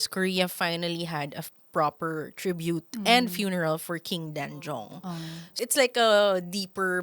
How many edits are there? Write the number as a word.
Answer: one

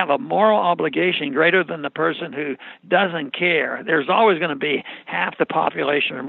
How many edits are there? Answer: zero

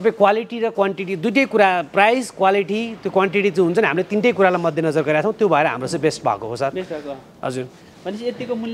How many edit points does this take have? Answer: zero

